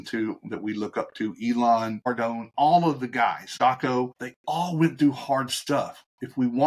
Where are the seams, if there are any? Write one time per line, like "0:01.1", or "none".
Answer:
0:01.9
0:03.5
0:04.3